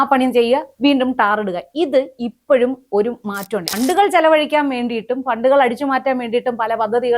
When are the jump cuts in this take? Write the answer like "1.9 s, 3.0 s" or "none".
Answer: 3.7 s